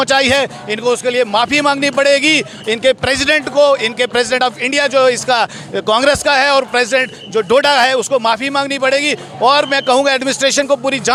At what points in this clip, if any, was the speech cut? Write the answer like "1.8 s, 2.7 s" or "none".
none